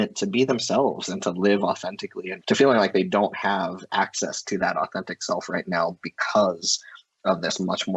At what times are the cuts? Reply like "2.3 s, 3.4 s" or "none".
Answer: none